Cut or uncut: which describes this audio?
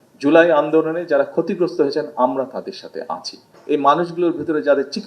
cut